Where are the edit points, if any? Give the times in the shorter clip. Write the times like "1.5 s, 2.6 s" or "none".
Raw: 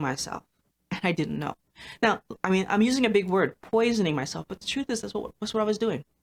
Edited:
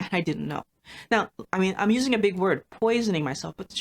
none

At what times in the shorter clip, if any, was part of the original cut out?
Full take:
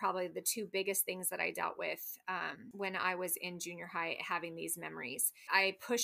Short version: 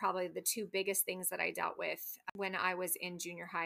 2.2 s

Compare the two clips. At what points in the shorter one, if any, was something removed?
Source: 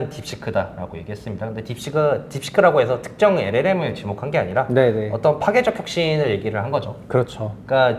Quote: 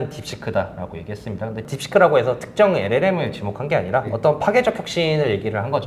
1.7 s, 4.1 s

